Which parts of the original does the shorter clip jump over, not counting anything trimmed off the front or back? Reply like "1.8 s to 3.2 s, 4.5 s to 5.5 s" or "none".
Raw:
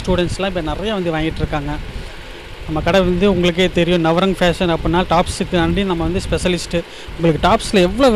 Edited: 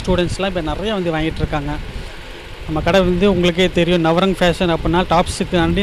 none